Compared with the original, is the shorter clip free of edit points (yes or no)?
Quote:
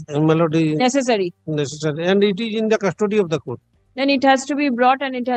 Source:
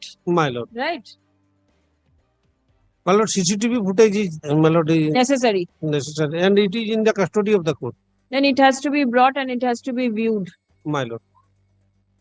yes